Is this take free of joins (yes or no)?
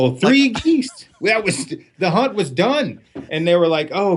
yes